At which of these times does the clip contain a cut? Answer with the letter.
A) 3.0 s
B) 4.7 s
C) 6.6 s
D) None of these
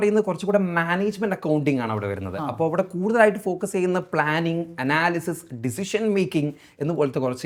D